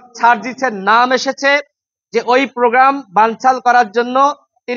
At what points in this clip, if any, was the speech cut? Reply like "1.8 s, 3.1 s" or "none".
none